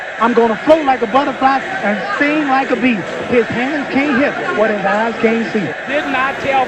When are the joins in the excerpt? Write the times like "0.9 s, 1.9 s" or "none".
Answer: none